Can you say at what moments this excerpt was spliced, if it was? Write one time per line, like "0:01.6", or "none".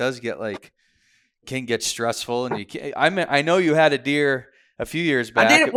none